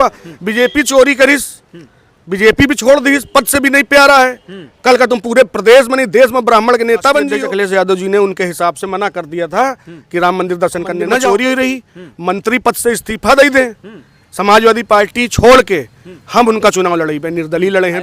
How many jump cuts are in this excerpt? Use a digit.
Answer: 2